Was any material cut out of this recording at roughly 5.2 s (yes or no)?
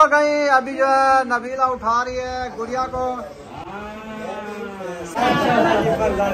yes